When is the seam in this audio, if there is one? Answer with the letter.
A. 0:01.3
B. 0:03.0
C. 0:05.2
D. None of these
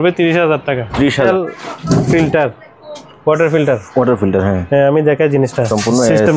A